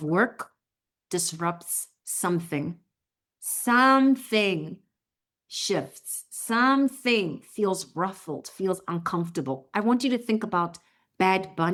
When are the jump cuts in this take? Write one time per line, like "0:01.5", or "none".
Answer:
none